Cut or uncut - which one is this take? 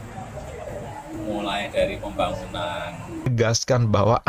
cut